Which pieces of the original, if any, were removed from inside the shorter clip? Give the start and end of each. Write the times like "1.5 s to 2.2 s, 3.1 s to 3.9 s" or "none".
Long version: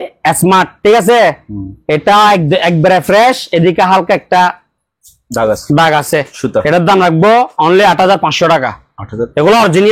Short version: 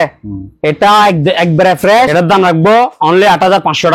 3.3 s to 6.7 s